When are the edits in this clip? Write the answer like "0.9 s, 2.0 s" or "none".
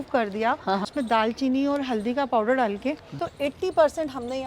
0.9 s, 3.1 s